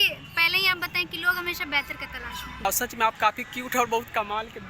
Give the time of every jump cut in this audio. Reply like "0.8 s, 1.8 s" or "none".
2.7 s